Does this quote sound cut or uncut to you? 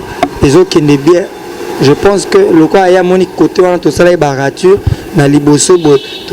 uncut